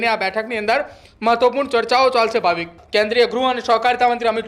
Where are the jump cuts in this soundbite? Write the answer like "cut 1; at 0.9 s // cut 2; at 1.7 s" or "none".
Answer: cut 1; at 2.8 s